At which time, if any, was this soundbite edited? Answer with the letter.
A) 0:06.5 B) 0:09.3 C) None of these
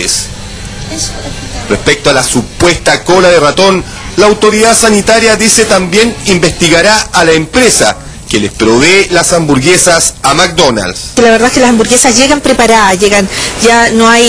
C